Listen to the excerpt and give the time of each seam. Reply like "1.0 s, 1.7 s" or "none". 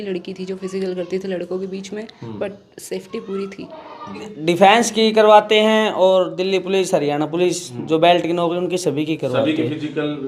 4.3 s